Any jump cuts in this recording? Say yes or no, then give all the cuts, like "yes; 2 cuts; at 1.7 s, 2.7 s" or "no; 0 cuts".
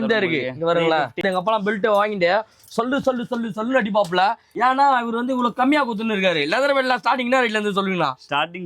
yes; 1 cut; at 1.2 s